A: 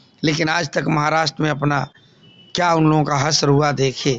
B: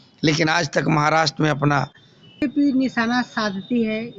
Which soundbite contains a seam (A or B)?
B